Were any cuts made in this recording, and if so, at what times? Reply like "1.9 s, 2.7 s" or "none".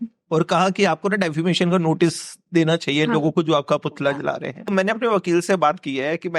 4.7 s